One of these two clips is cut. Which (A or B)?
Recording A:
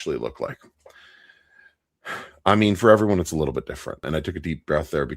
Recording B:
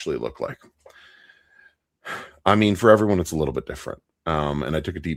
A